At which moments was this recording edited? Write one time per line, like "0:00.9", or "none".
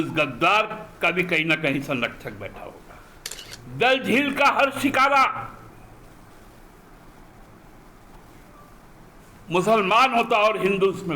0:03.5